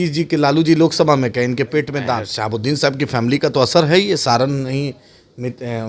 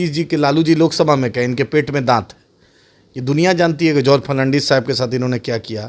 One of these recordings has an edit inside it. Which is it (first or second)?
first